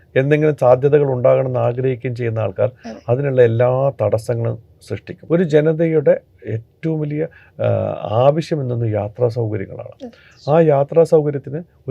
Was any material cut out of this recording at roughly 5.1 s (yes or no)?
yes